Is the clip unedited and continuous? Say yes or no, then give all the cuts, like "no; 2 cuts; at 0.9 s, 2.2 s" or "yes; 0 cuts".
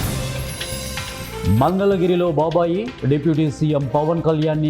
no; 1 cut; at 1.4 s